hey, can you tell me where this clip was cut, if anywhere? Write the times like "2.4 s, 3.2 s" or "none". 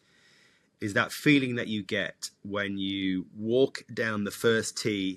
none